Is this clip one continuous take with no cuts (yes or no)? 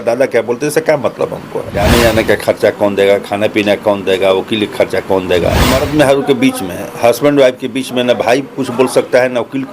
no